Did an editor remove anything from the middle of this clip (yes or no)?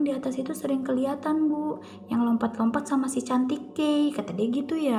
no